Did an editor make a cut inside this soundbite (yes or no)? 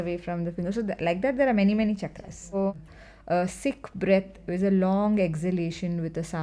yes